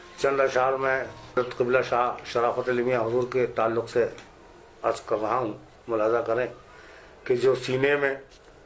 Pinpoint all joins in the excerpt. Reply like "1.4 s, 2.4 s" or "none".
1.4 s